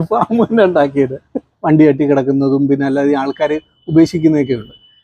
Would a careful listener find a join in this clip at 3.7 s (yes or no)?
no